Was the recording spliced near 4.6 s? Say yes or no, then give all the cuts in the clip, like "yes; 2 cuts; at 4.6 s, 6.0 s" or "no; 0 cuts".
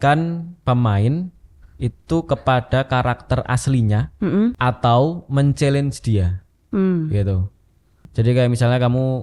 yes; 2 cuts; at 4.6 s, 8.1 s